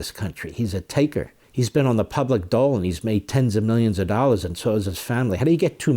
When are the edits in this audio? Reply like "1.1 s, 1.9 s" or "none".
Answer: 1.4 s